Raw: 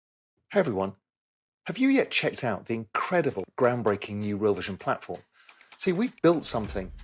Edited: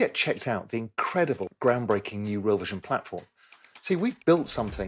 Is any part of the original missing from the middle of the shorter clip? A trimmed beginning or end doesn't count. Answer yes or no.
no